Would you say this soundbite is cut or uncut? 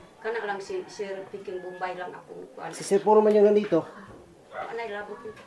uncut